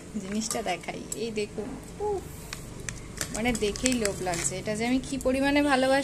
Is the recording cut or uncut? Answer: uncut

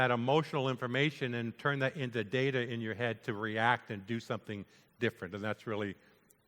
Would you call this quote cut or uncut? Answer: uncut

